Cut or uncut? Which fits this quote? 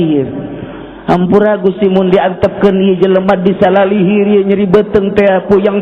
uncut